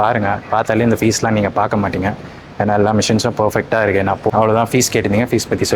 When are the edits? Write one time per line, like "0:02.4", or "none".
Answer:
0:04.3